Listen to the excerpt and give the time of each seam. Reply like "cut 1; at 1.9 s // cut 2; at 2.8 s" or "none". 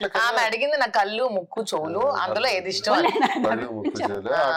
none